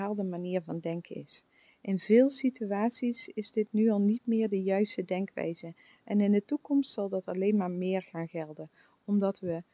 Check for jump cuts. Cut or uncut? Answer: uncut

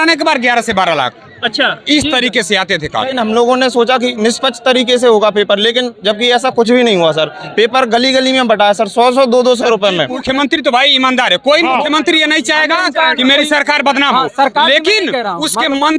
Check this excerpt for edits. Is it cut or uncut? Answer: cut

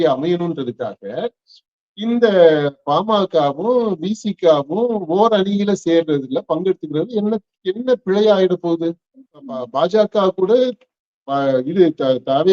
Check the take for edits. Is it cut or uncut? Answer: cut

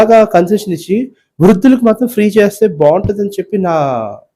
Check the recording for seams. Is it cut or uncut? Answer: uncut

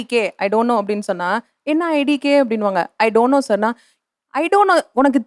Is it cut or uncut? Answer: uncut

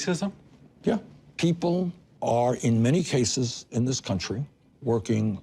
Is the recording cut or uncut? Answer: cut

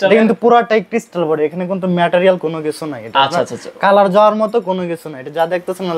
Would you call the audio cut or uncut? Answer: uncut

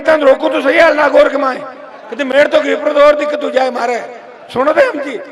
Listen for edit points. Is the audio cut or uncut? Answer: uncut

